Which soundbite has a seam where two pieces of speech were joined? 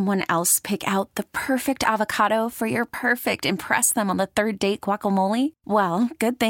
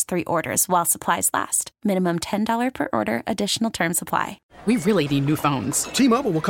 second; 1 cut; at 4.4 s

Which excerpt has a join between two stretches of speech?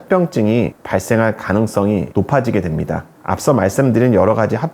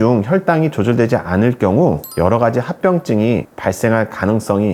first; 1 cut; at 3.2 s

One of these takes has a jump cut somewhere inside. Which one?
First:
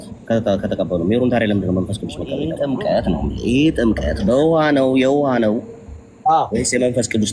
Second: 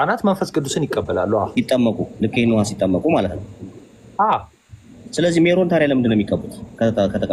first; 1 cut; at 2.5 s

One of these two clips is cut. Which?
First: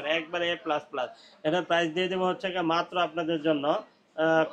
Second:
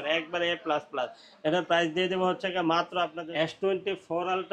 second; 1 cut; at 3.2 s

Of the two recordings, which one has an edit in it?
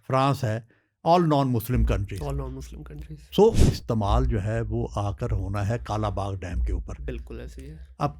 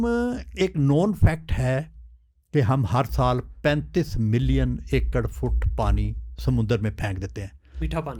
first; 1 cut; at 3.7 s

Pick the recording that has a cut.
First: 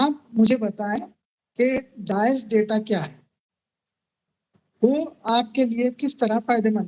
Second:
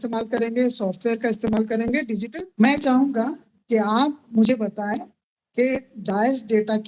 second; 1 cut; at 2.2 s

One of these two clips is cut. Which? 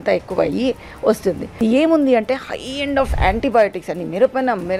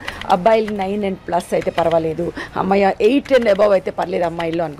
first; 1 cut; at 1.6 s

